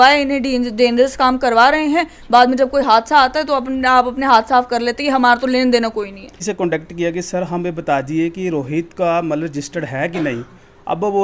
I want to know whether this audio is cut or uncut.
cut